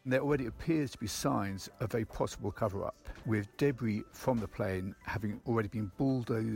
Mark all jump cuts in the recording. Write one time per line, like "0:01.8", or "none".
0:02.6
0:04.1